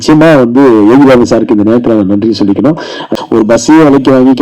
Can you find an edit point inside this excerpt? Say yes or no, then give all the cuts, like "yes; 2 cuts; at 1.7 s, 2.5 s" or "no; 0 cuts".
yes; 1 cut; at 3.1 s